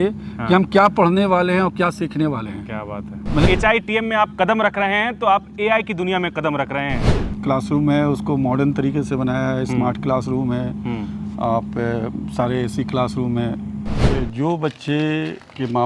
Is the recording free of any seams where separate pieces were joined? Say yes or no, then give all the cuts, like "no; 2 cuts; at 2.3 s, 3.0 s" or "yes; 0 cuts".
no; 3 cuts; at 3.5 s, 7.2 s, 14.0 s